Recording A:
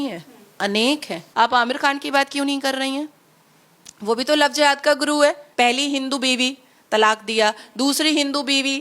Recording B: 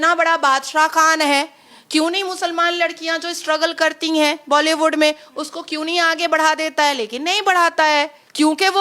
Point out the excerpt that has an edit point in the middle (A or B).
A